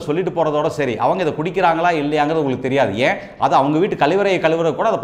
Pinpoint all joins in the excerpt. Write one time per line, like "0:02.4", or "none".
none

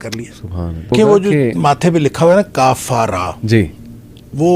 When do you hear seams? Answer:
0:00.9

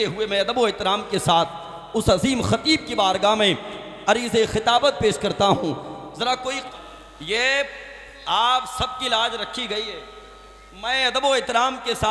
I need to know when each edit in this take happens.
0:06.7

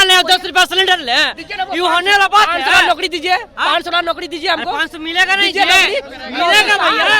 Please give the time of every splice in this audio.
none

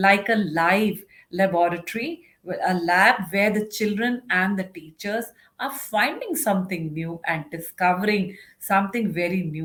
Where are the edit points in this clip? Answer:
none

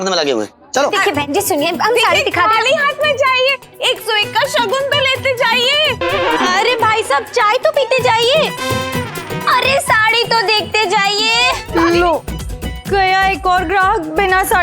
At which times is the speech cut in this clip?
0:00.9
0:11.6

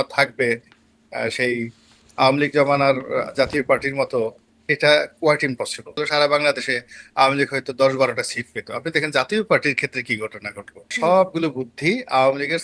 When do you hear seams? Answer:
0:06.0
0:10.9

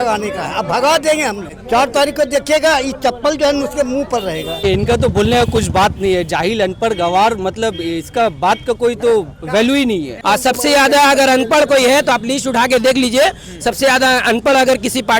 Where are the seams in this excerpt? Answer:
0:01.5
0:04.6
0:10.2

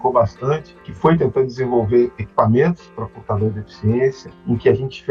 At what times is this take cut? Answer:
none

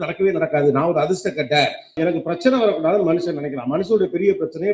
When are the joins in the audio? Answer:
0:01.9

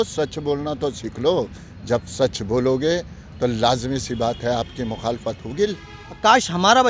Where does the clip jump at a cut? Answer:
0:05.7

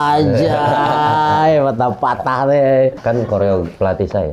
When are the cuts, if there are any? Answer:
0:03.0

